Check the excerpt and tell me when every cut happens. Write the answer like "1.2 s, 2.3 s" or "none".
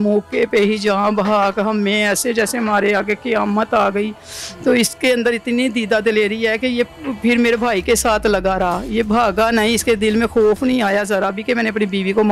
none